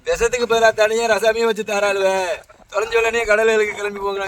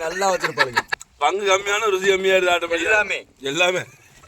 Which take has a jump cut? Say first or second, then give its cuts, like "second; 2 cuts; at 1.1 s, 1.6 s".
second; 1 cut; at 1.2 s